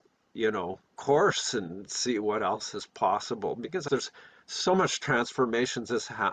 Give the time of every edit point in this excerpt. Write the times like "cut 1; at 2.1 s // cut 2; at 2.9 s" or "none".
cut 1; at 3.9 s